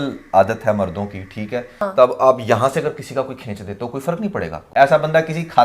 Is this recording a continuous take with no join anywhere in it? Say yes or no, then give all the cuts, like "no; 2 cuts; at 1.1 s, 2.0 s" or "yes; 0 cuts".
no; 2 cuts; at 1.8 s, 4.6 s